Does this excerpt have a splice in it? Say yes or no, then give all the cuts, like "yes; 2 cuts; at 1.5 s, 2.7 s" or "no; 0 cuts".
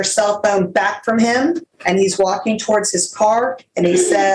yes; 1 cut; at 1.7 s